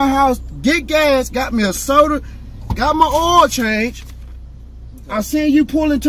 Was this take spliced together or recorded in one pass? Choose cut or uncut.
uncut